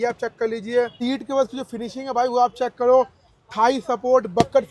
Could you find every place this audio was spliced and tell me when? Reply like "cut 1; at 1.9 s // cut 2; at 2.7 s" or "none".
cut 1; at 0.9 s